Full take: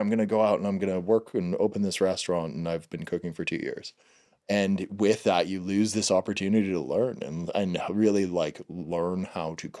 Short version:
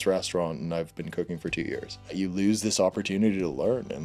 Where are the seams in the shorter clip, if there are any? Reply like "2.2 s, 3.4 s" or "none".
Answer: 2.2 s